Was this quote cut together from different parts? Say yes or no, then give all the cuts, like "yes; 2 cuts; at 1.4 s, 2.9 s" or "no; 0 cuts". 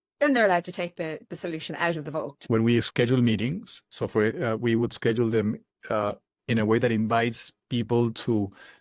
yes; 1 cut; at 2.4 s